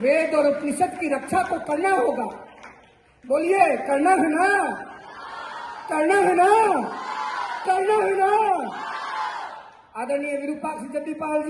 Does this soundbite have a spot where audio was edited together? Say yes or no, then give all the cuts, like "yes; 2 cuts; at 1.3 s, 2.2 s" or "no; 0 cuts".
no; 0 cuts